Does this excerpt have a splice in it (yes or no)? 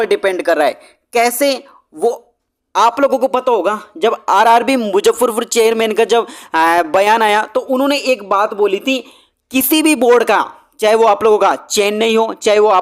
no